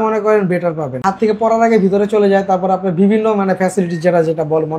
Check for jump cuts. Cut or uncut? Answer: cut